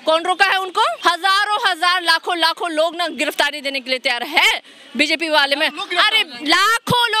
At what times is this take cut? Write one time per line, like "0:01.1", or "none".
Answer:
0:01.0